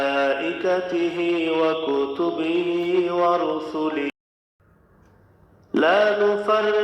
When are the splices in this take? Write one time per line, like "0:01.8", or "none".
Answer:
0:04.1